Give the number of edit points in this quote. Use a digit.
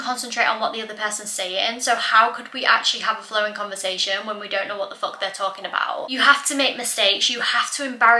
1